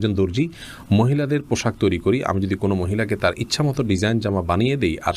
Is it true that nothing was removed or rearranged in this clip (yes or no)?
yes